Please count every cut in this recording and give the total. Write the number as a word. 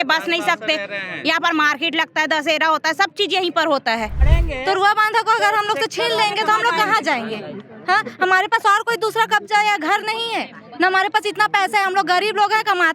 one